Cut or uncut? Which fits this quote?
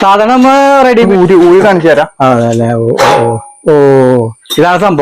cut